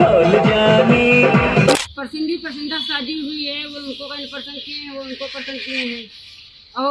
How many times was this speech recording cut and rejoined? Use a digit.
1